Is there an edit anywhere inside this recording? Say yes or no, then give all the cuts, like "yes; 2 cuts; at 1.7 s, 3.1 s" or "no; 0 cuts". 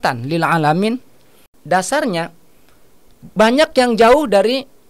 yes; 1 cut; at 1.5 s